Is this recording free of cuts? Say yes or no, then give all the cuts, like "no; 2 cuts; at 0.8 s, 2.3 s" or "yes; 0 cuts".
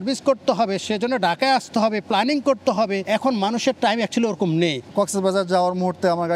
no; 2 cuts; at 3.0 s, 4.8 s